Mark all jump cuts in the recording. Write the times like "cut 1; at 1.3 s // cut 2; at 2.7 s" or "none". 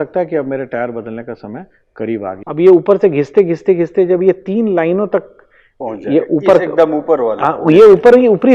cut 1; at 2.4 s